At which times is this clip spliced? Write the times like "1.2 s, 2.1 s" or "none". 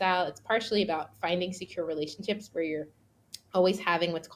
none